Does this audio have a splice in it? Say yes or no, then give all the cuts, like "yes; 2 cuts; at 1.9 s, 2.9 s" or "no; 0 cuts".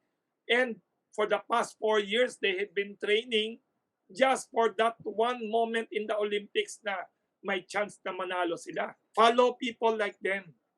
yes; 1 cut; at 9.0 s